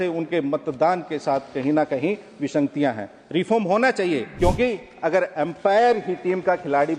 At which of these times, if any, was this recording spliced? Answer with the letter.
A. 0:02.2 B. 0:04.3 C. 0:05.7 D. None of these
B